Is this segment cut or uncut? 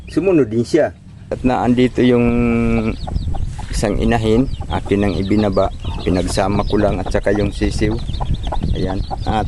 cut